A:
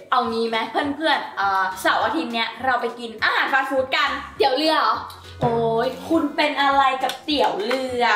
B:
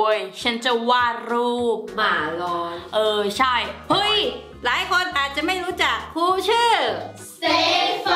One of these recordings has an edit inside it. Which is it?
B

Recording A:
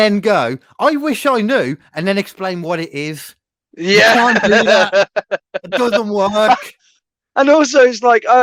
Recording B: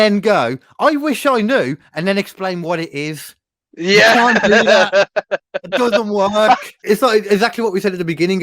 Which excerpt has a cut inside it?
B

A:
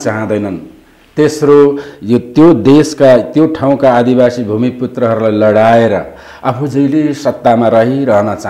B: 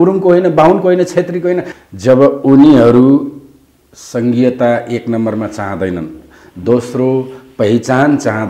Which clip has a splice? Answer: B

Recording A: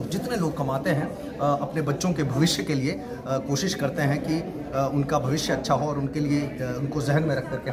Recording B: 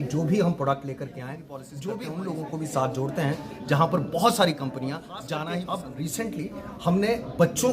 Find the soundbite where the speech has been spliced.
B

